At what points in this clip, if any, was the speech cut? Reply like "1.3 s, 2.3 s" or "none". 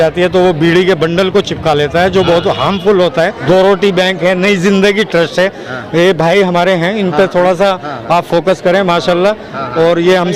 3.4 s